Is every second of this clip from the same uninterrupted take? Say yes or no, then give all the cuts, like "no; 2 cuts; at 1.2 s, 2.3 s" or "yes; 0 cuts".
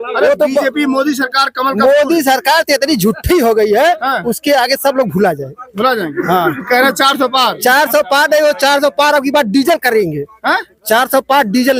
yes; 0 cuts